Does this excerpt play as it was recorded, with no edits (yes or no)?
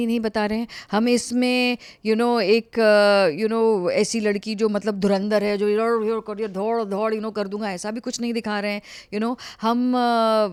yes